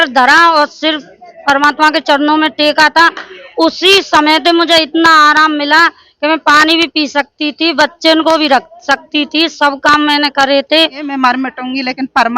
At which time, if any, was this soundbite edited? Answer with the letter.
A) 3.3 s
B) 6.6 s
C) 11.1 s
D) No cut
C